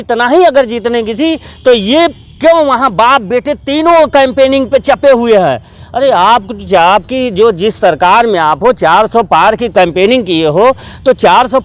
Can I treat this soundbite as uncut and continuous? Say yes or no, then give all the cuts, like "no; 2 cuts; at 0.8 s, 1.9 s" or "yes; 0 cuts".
yes; 0 cuts